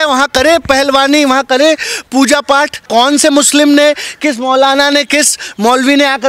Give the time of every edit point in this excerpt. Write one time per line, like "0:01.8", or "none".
0:02.9